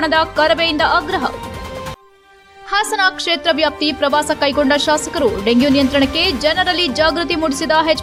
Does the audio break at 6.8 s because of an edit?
no; 0 cuts

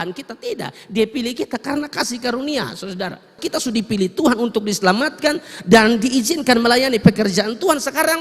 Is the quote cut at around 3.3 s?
yes; 1 cut; at 3.3 s

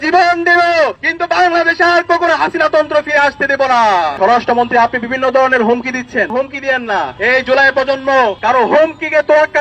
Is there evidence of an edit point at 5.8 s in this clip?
no; 3 cuts; at 4.1 s, 7.1 s, 8.4 s

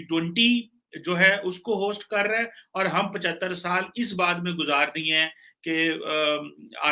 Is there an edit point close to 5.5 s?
no; 0 cuts

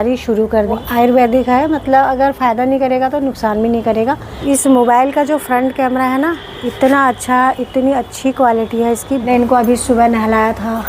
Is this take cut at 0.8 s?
yes; 3 cuts; at 0.8 s, 4.3 s, 9.3 s

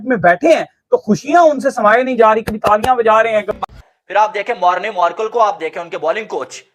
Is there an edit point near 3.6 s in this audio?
yes; 1 cut; at 3.6 s

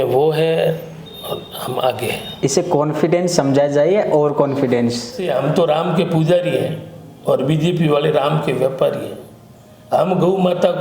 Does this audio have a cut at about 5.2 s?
yes; 1 cut; at 5.2 s

